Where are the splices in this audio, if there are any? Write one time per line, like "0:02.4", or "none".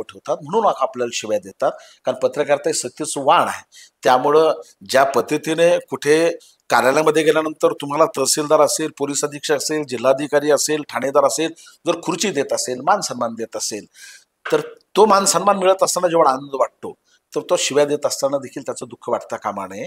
none